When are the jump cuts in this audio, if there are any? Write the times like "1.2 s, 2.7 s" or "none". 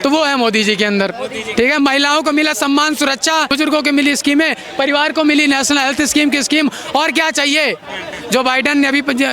3.5 s, 8.1 s